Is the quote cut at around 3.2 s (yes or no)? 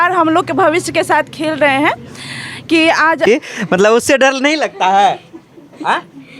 yes